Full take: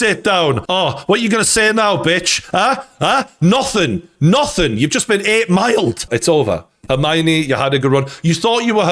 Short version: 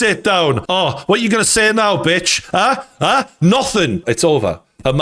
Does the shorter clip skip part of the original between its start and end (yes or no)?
yes